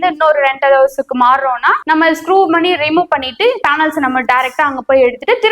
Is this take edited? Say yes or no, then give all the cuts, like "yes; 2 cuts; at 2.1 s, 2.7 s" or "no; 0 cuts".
no; 0 cuts